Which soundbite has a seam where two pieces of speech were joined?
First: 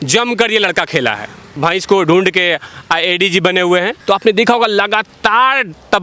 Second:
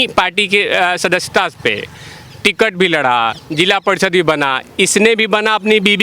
first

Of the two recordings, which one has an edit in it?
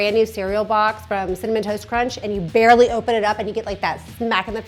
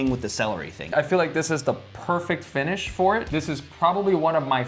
second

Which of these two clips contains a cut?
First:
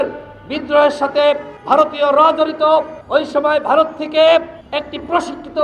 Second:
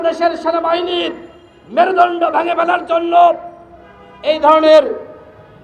first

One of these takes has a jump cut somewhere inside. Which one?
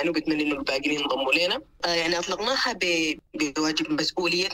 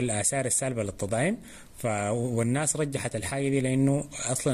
first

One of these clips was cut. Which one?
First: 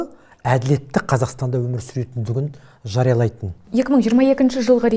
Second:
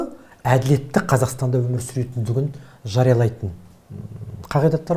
first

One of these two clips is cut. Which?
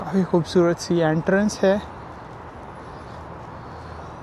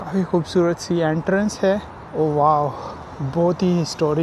second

